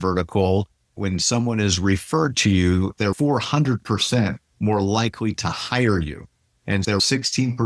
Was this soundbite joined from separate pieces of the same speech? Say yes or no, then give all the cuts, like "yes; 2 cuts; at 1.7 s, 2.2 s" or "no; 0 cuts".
yes; 3 cuts; at 0.9 s, 3.0 s, 6.9 s